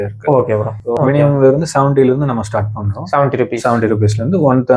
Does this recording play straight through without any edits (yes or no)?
no